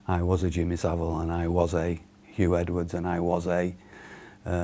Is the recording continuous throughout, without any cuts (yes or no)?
yes